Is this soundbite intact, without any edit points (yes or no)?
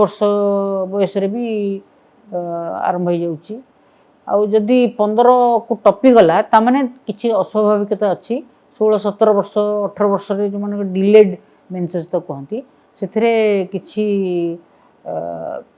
yes